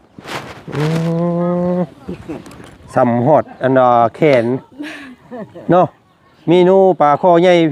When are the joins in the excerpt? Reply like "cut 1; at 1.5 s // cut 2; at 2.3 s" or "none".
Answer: none